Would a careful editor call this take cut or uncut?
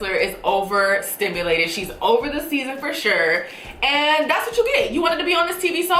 uncut